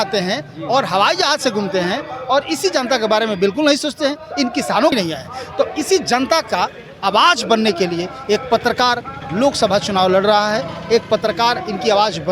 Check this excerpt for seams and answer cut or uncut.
cut